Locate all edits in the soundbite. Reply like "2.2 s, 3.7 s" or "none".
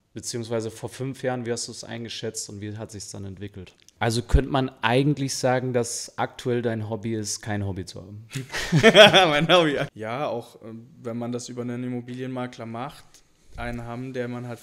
3.8 s, 9.9 s